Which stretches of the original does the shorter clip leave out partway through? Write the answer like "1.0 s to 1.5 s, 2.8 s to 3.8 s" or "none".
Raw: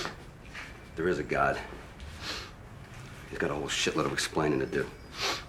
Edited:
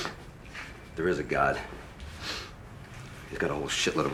none